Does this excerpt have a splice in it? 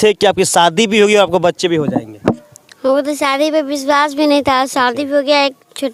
no; 0 cuts

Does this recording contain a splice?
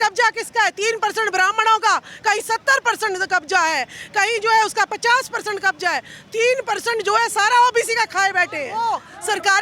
yes; 1 cut; at 8.7 s

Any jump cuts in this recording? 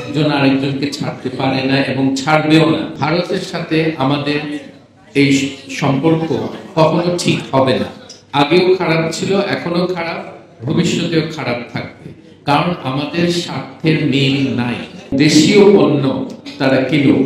yes; 2 cuts; at 3.0 s, 15.1 s

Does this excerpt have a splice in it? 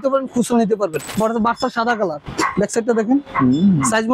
yes; 2 cuts; at 1.1 s, 2.2 s

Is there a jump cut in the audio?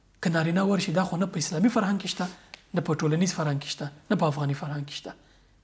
no; 0 cuts

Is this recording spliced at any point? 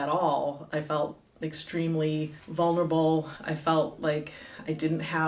yes; 2 cuts; at 2.4 s, 3.4 s

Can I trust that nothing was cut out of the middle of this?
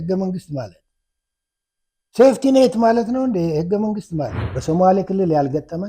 no; 1 cut; at 4.5 s

